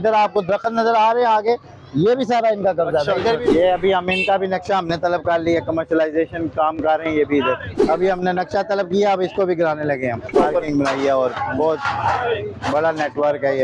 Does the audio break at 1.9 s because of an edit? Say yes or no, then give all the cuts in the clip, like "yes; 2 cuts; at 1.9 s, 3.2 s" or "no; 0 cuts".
no; 3 cuts; at 3.4 s, 7.7 s, 10.3 s